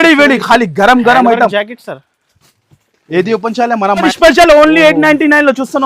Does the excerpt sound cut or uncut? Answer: cut